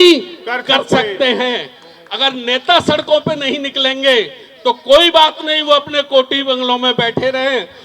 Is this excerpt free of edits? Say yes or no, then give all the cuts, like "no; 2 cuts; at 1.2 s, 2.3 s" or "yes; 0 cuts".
yes; 0 cuts